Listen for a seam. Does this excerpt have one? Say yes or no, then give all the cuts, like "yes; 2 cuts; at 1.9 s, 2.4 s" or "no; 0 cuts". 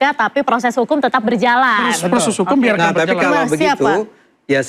no; 0 cuts